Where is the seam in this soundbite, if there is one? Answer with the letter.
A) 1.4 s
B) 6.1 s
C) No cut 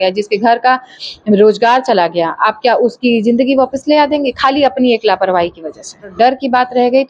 B